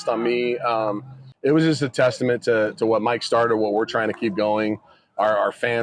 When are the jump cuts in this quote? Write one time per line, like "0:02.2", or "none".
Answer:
0:01.2

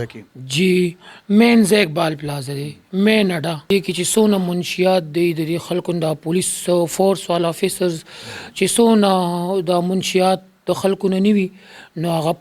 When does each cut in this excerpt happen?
0:03.7

